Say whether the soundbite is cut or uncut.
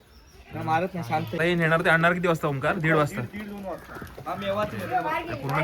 cut